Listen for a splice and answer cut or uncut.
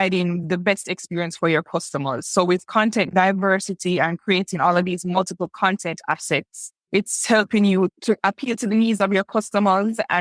uncut